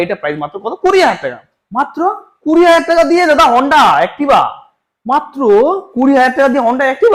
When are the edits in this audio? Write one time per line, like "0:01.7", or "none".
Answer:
none

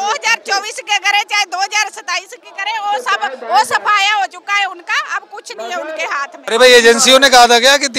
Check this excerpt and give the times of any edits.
0:06.4

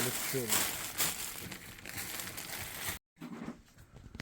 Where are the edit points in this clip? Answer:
0:03.1

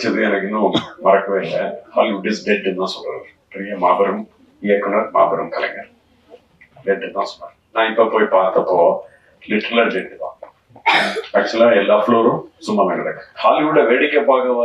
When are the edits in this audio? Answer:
0:13.2

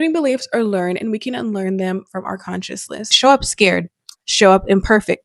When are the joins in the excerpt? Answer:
0:03.1

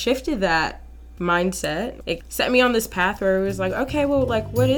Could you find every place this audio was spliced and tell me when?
0:02.0

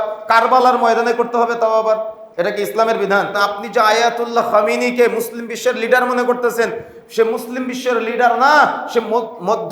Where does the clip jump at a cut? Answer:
0:03.4

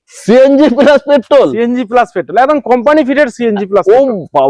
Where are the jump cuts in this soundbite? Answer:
none

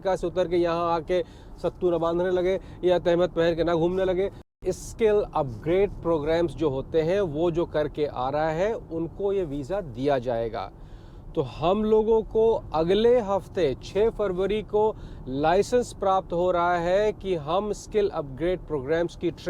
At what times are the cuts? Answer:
0:04.5

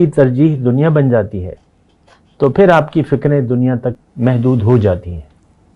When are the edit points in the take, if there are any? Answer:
0:04.0

